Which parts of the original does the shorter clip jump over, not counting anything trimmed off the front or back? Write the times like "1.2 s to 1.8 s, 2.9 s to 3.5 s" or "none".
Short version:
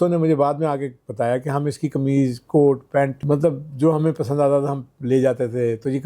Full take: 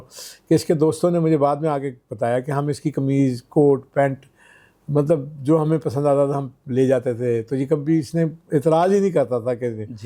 4.2 s to 4.8 s